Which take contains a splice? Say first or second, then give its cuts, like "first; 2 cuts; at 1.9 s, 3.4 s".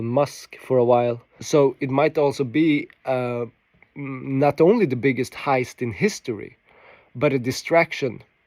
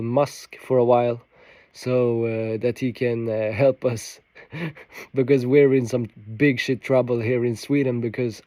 first; 1 cut; at 1.3 s